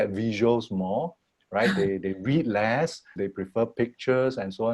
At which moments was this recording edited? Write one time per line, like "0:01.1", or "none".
0:03.0